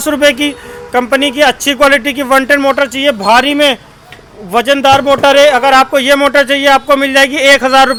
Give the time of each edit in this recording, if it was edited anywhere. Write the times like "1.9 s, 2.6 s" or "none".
none